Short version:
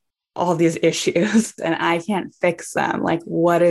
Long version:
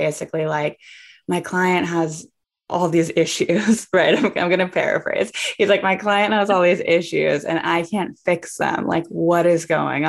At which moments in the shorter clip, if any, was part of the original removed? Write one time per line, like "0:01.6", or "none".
0:01.6